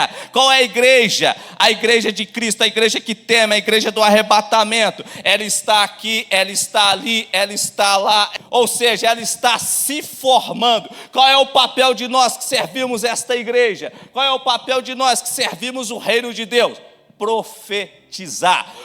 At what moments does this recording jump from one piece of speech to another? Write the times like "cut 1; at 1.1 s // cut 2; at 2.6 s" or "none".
cut 1; at 8.4 s